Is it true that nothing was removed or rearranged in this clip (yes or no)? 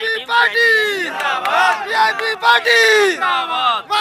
yes